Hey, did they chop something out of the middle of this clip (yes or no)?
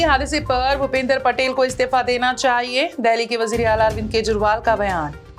no